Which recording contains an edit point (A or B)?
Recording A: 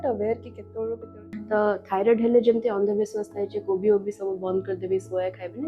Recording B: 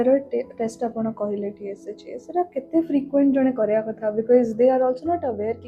A